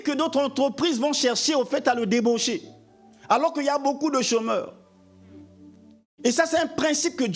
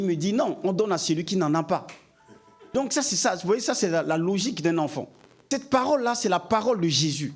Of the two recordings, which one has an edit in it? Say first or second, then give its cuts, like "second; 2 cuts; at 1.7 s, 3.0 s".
second; 2 cuts; at 2.7 s, 5.4 s